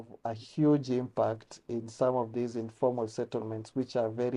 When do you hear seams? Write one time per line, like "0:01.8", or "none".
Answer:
none